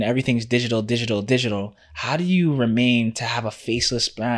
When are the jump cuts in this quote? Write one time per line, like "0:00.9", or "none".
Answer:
none